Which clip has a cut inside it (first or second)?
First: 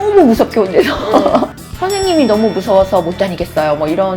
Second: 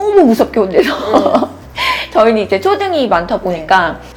first